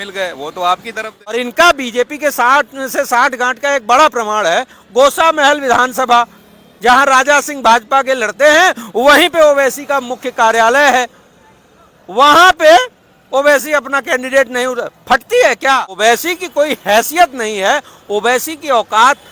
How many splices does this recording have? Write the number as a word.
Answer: two